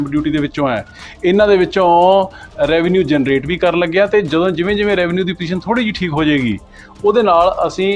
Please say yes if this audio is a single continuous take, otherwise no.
yes